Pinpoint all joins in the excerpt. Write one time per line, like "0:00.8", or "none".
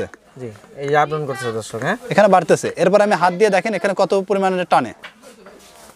none